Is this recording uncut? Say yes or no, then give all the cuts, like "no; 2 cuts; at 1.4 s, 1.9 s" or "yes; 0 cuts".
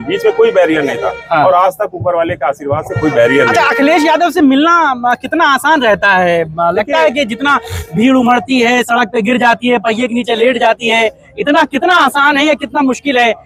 yes; 0 cuts